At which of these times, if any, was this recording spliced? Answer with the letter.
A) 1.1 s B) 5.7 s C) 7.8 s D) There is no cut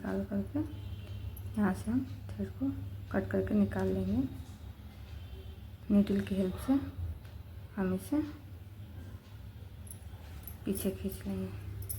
B